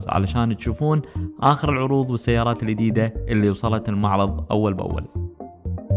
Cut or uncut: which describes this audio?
cut